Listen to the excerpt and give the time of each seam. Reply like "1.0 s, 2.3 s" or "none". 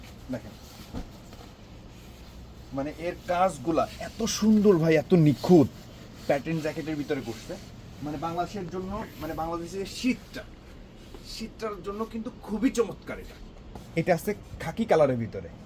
13.7 s